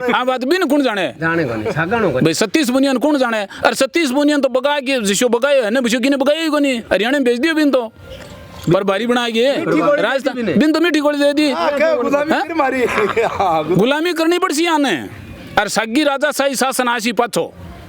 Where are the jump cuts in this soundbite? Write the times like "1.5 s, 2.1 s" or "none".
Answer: none